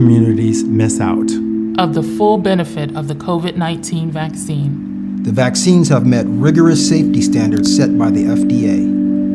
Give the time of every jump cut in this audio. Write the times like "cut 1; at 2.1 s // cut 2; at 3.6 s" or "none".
none